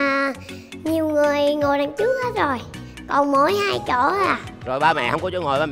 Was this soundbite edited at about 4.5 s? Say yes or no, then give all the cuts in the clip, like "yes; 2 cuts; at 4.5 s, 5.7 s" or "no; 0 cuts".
yes; 1 cut; at 4.5 s